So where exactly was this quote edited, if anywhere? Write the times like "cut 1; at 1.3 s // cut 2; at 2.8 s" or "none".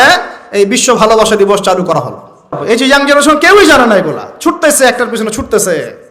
cut 1; at 2.6 s

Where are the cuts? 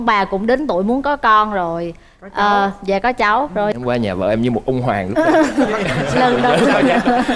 cut 1; at 3.8 s

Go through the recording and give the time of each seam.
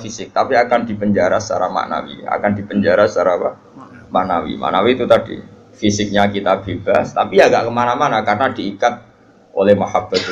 none

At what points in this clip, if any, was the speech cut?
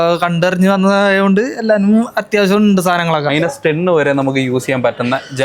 cut 1; at 3.3 s

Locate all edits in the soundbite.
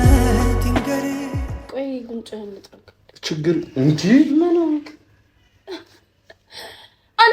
cut 1; at 1.5 s

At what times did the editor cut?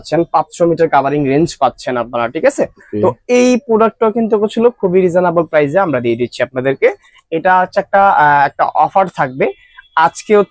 none

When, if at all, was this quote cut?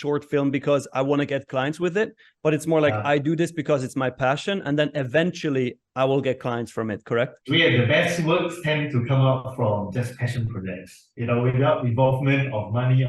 cut 1; at 7.4 s

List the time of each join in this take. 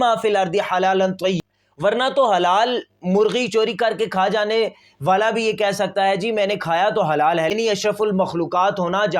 cut 1; at 1.4 s // cut 2; at 7.5 s

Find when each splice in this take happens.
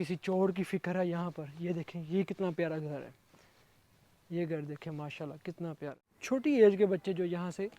cut 1; at 6.1 s

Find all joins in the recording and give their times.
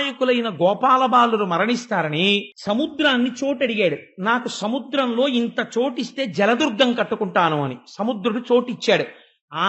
cut 1; at 2.5 s

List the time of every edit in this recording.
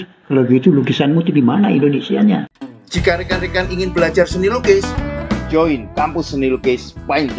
cut 1; at 2.5 s

